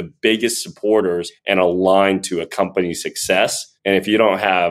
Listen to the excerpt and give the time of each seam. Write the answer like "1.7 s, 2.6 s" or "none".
1.3 s, 3.7 s